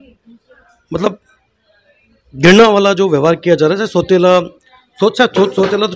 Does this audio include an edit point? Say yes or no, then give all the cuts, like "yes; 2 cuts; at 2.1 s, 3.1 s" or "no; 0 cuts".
no; 0 cuts